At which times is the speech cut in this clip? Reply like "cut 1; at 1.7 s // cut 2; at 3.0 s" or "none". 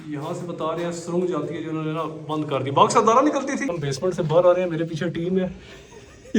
cut 1; at 3.7 s